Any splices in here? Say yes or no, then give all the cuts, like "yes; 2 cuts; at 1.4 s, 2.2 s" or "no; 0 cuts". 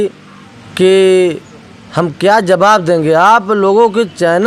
no; 0 cuts